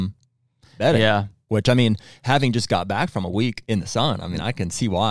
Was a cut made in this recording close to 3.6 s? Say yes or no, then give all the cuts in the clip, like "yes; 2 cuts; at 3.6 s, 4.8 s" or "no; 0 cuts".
yes; 2 cuts; at 1.4 s, 3.6 s